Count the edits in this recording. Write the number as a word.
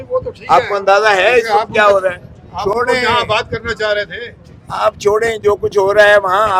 zero